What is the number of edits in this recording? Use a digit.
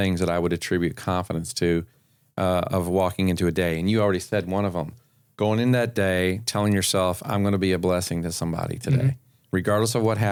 0